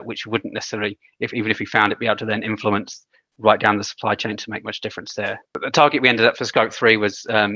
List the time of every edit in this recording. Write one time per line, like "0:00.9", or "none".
0:05.5